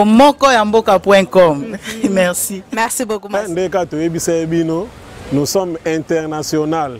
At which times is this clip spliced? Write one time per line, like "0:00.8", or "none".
0:03.4